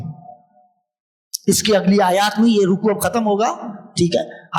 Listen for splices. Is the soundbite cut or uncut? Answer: uncut